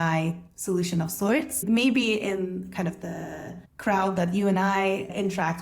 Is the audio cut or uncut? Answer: cut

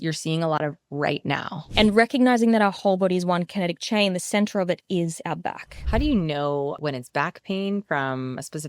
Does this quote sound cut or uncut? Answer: cut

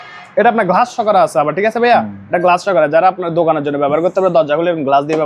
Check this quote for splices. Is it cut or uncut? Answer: uncut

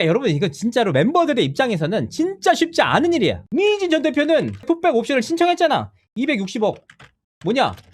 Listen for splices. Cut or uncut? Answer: cut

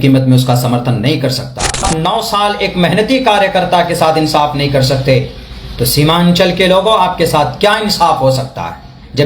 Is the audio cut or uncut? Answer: cut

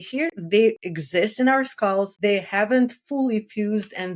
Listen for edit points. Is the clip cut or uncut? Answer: cut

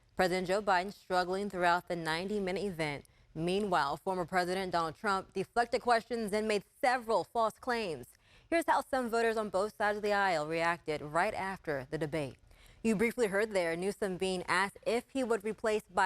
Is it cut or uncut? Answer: cut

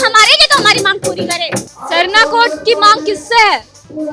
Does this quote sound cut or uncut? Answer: cut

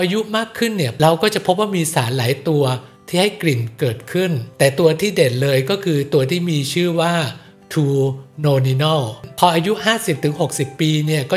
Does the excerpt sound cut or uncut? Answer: cut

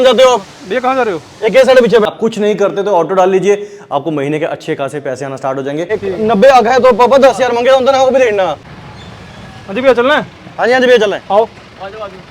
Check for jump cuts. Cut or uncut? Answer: cut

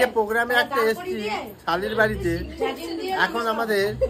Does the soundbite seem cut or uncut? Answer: uncut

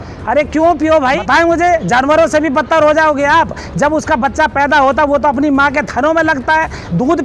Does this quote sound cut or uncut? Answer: cut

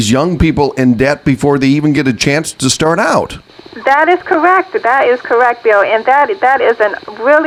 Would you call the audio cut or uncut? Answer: uncut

